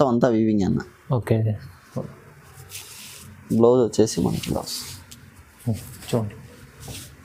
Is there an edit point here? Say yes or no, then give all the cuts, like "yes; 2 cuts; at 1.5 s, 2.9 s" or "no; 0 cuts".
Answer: no; 0 cuts